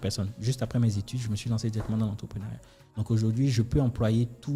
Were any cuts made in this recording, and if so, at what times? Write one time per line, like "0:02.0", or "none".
none